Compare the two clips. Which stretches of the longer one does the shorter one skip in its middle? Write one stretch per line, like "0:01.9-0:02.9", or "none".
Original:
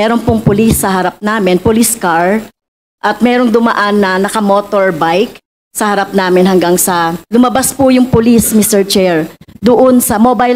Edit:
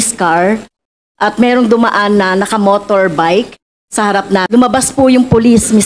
0:06.3-0:07.2